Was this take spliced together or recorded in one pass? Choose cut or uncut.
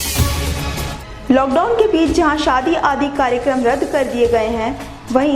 cut